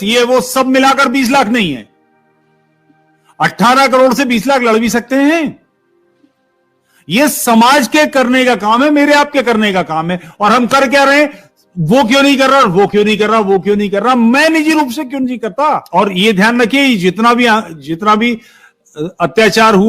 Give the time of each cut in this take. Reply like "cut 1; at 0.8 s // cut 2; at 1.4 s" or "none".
cut 1; at 15.8 s